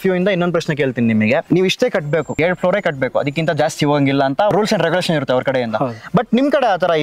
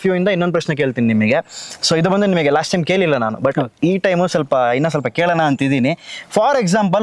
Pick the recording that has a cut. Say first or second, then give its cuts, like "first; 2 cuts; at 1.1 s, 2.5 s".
first; 3 cuts; at 1.4 s, 2.3 s, 4.5 s